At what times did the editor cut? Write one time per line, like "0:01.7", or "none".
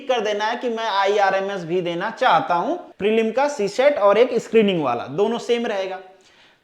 0:02.8